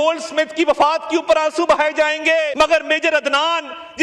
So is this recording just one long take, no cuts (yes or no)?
no